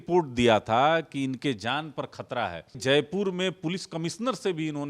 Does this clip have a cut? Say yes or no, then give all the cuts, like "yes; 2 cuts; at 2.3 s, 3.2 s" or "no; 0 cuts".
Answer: yes; 1 cut; at 2.8 s